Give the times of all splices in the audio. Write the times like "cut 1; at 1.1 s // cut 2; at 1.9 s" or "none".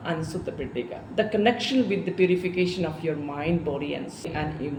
none